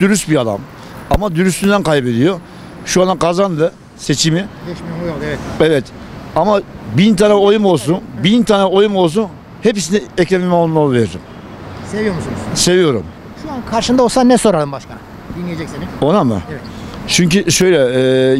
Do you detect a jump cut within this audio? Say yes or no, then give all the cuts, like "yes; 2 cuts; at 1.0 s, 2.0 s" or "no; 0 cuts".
no; 0 cuts